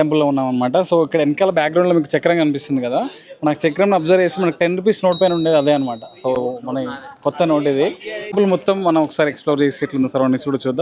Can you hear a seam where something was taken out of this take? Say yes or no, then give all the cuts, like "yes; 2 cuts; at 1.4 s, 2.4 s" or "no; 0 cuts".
no; 0 cuts